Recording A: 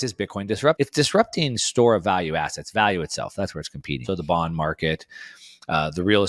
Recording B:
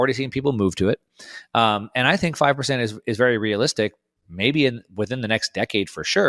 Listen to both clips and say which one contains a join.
A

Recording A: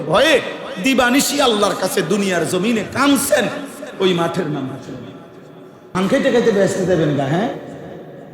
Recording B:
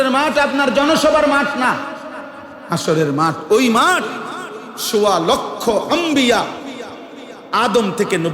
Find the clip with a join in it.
A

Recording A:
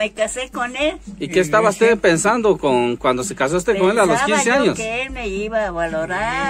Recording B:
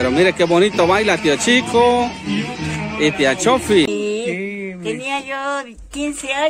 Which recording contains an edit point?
B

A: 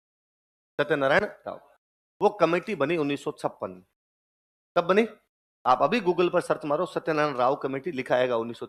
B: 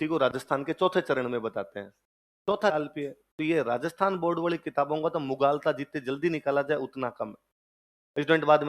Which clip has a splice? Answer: B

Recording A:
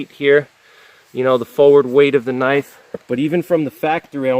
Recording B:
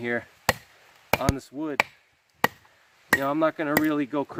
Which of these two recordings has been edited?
A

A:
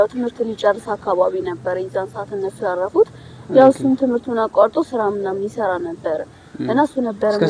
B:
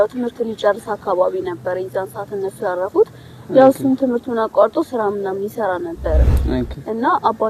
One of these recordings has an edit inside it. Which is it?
B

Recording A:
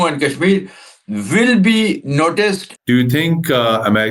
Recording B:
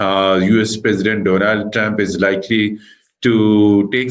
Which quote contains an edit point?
A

